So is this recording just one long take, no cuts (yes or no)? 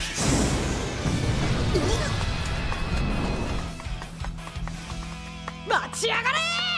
no